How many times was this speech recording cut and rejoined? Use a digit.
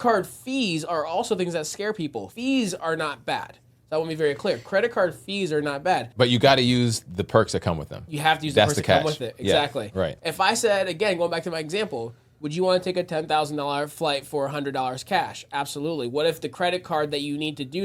3